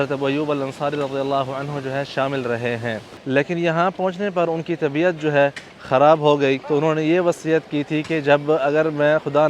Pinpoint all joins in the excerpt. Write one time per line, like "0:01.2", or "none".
0:03.1
0:06.6